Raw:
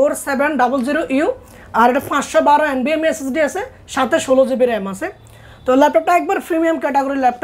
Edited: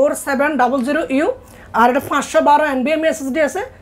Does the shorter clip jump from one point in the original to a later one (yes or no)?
no